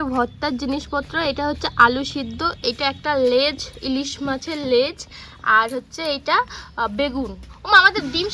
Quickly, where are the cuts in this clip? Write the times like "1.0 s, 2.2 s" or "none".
none